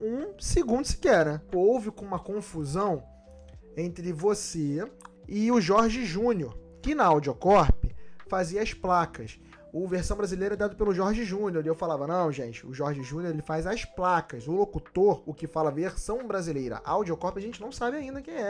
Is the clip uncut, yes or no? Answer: no